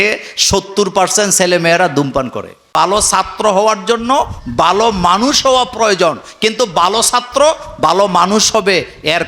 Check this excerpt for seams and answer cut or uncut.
cut